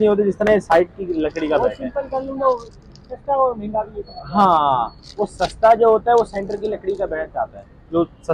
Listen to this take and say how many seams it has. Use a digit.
0